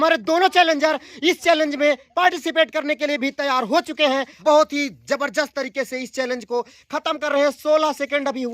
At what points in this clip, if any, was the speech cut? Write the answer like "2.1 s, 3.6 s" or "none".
4.3 s